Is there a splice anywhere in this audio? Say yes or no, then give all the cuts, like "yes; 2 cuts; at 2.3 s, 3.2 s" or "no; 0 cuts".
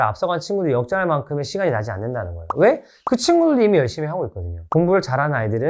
yes; 1 cut; at 4.5 s